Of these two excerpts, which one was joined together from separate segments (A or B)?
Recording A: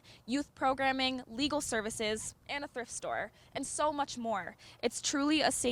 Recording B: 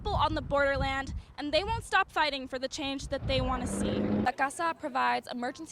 B